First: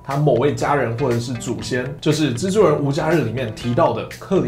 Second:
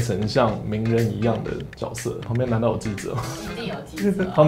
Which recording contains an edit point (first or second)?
second